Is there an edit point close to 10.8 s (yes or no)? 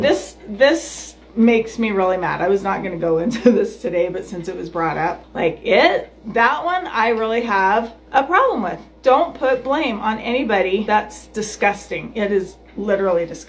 yes